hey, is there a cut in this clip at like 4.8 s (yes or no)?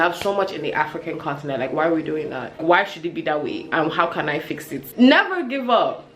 yes